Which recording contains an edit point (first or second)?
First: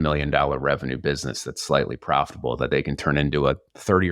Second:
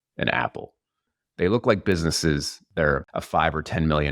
second